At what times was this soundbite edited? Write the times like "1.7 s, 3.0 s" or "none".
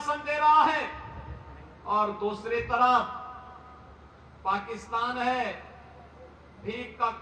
none

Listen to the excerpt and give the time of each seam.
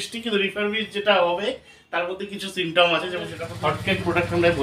3.4 s

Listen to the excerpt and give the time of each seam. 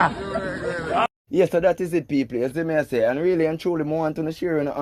none

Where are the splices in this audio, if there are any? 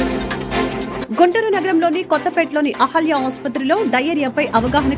1.0 s

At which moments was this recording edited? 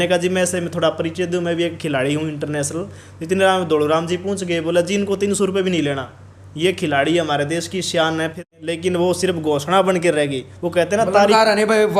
8.5 s

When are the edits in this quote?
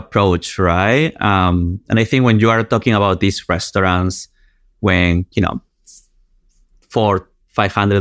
none

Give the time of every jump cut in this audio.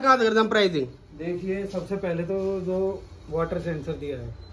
none

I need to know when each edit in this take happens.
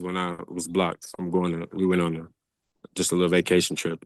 none

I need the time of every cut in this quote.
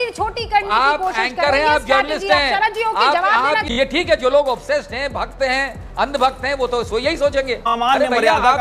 3.6 s, 7.6 s

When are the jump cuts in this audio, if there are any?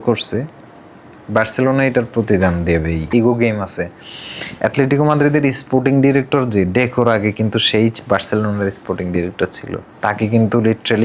3.1 s

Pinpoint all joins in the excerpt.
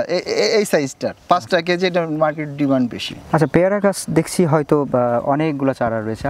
none

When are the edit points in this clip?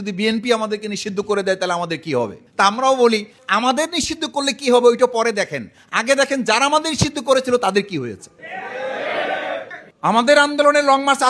3.4 s, 9.7 s

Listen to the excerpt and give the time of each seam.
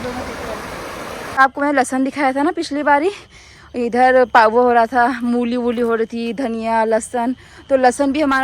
1.4 s

